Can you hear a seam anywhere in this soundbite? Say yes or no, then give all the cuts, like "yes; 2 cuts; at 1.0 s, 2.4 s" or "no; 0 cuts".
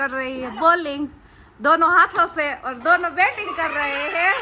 no; 0 cuts